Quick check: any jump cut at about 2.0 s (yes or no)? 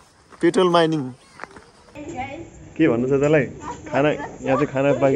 yes